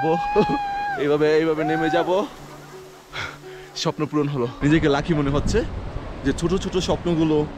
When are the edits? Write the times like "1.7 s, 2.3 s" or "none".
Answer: 4.5 s